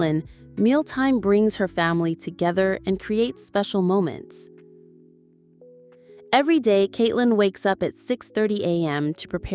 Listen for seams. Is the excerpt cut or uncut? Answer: cut